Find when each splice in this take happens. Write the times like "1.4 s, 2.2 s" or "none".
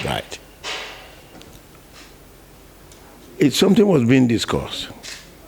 1.4 s